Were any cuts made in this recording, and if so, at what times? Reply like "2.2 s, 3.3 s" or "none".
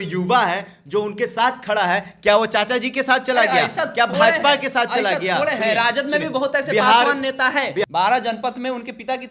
7.9 s